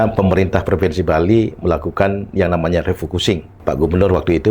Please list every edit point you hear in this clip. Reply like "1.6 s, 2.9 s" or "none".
3.5 s